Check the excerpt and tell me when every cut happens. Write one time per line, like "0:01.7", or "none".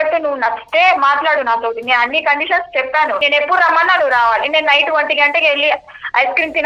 0:03.2